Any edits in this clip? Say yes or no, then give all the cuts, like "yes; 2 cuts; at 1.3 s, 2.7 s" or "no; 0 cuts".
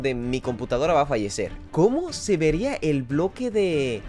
yes; 1 cut; at 1.5 s